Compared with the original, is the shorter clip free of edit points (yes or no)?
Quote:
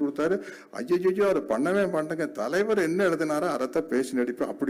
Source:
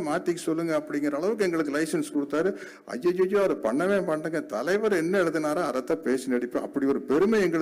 yes